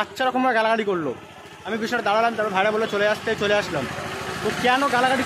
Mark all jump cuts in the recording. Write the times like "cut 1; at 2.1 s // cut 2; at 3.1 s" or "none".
none